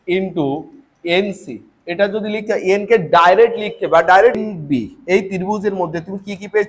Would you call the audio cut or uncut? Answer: cut